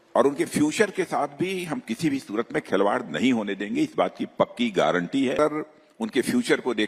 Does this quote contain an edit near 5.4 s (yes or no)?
yes